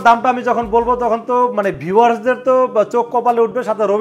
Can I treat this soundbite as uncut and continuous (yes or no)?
yes